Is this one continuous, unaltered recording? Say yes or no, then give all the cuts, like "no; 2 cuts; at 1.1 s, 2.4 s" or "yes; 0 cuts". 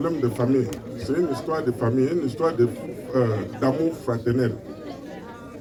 yes; 0 cuts